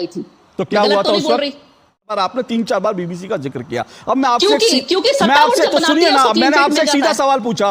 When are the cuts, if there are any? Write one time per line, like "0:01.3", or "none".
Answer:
0:02.1